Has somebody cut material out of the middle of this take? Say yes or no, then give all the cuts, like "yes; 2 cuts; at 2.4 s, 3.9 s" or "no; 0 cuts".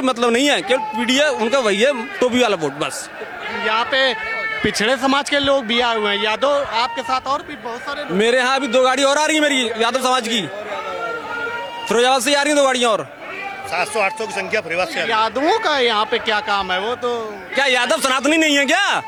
no; 0 cuts